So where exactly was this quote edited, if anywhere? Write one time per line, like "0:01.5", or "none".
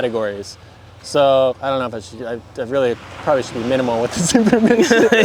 none